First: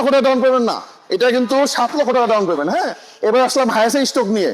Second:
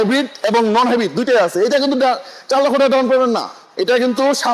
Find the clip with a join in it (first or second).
first